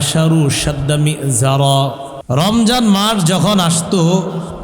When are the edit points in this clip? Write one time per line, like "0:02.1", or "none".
0:02.1